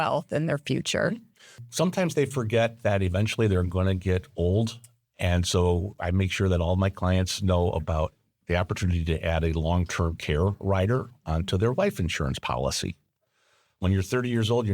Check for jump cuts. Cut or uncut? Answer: cut